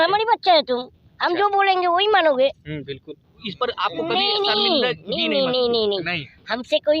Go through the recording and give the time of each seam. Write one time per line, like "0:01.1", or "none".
0:03.5

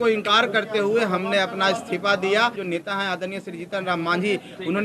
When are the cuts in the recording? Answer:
0:02.6

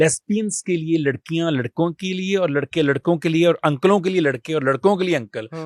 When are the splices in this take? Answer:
none

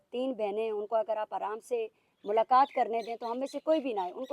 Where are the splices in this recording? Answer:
none

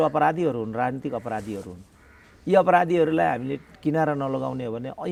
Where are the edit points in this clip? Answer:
none

